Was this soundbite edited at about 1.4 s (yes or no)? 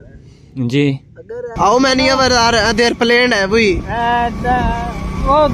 yes